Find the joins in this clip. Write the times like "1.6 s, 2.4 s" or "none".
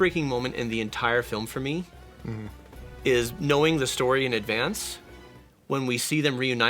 none

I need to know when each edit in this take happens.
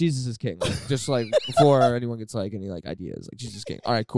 none

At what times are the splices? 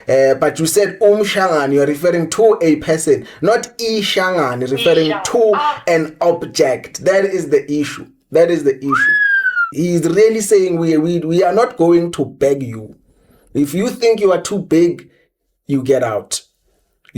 9.7 s

